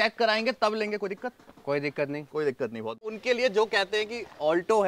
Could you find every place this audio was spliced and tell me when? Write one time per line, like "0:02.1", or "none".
0:03.1